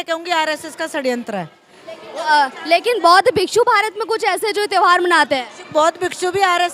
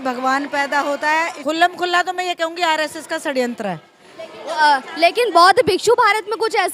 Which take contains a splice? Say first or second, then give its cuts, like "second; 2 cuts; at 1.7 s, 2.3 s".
second; 1 cut; at 1.3 s